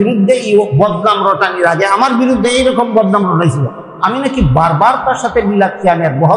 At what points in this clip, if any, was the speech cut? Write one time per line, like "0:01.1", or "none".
none